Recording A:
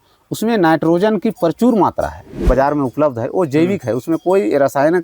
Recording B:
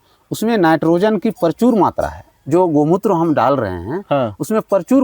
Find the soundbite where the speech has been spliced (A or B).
A